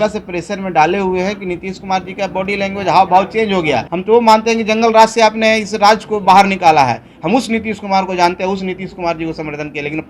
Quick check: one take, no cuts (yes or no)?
no